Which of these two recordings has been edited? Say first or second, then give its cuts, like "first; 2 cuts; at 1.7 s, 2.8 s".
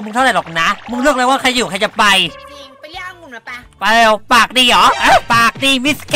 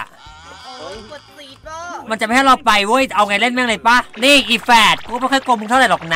second; 1 cut; at 4.1 s